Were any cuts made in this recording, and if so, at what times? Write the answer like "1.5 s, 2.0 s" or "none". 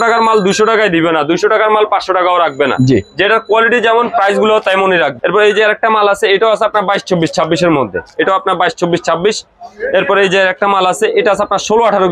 none